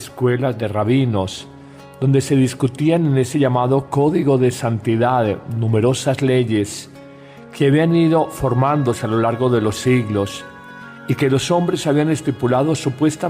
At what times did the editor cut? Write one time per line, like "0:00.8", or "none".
0:12.0